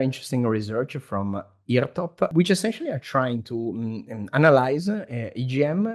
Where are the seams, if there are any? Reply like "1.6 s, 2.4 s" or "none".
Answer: 2.3 s

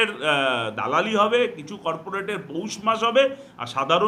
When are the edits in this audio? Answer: none

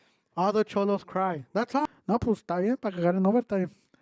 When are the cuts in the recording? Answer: 1.8 s

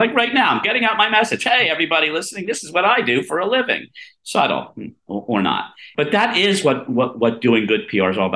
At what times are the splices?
5.9 s

